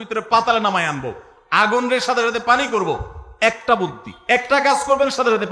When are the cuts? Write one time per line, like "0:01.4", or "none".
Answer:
none